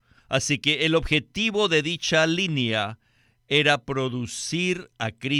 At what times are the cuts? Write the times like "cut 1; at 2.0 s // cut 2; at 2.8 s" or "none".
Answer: none